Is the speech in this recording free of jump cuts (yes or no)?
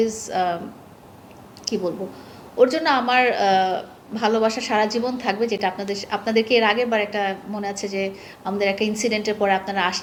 yes